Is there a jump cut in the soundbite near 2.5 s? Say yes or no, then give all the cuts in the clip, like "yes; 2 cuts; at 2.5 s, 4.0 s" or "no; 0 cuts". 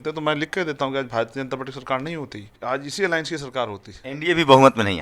yes; 1 cut; at 2.5 s